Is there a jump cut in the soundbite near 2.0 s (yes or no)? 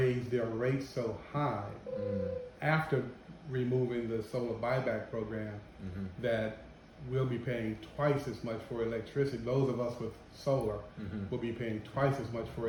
no